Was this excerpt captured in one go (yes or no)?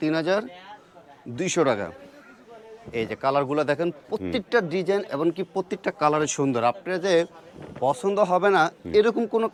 yes